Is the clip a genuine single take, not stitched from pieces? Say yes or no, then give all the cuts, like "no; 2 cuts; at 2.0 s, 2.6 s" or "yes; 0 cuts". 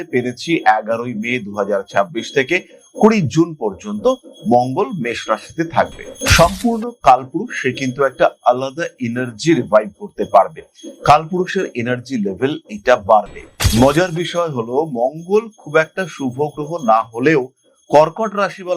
no; 1 cut; at 13.6 s